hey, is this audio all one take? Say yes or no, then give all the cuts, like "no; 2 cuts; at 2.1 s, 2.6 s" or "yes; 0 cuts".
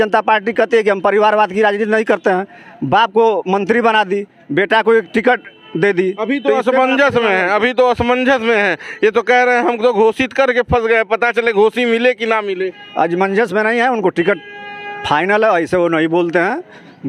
yes; 0 cuts